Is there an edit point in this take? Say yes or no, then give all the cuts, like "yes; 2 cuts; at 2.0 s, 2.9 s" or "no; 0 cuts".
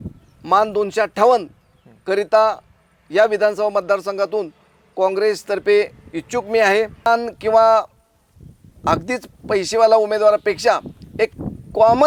yes; 1 cut; at 7.1 s